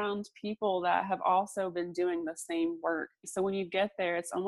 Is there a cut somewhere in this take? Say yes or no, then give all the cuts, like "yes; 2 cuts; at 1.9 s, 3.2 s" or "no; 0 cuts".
yes; 1 cut; at 3.2 s